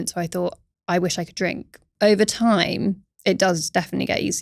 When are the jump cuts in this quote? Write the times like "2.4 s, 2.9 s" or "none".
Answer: 1.9 s, 3.1 s